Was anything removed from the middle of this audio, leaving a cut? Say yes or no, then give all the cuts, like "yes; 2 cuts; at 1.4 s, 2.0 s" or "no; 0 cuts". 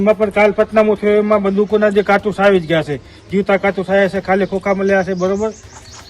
no; 0 cuts